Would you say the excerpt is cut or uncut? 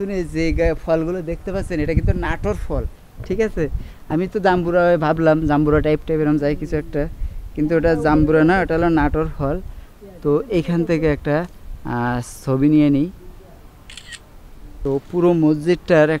uncut